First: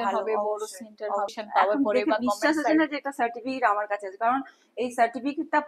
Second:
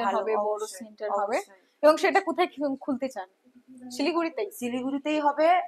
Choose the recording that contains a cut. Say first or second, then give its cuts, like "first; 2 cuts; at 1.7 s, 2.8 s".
first; 1 cut; at 1.3 s